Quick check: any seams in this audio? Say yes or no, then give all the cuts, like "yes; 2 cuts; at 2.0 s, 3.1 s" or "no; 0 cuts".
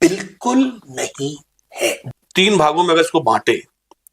yes; 1 cut; at 2.0 s